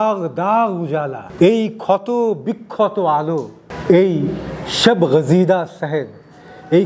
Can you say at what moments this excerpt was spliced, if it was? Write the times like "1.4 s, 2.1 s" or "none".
1.2 s